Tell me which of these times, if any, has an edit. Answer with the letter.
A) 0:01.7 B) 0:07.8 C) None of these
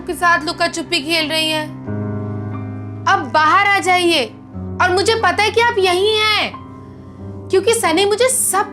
C